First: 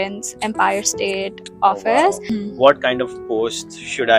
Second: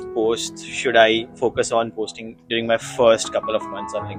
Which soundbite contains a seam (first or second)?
first